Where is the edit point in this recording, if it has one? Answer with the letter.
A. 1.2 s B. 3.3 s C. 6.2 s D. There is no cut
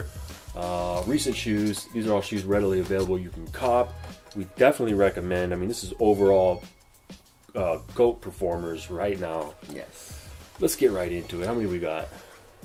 D